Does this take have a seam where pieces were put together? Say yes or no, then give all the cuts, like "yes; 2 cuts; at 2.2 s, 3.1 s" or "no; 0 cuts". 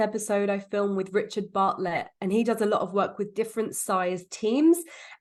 no; 0 cuts